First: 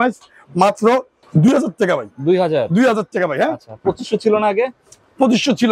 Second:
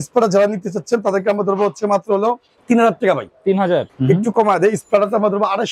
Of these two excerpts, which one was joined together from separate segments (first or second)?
second